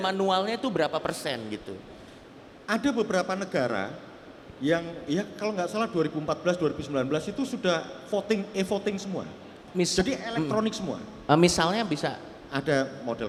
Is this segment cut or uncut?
uncut